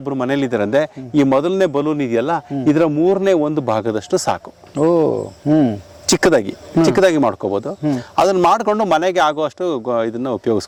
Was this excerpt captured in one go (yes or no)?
yes